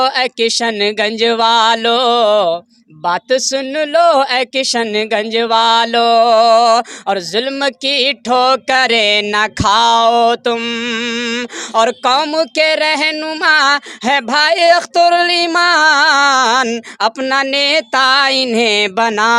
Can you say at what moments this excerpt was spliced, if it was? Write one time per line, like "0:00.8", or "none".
none